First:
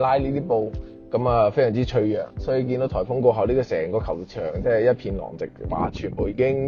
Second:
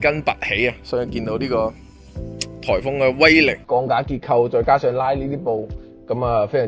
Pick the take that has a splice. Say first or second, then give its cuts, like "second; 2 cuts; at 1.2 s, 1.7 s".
second; 1 cut; at 3.6 s